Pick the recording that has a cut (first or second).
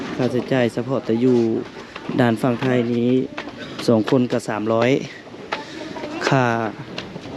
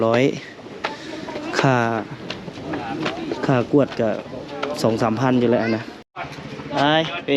second